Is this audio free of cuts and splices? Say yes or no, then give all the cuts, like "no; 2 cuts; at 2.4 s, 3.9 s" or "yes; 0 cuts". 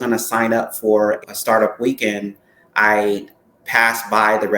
no; 1 cut; at 1.2 s